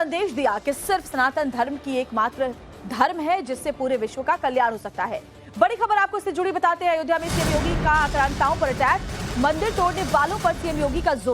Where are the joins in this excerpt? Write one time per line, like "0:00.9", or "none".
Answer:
0:08.9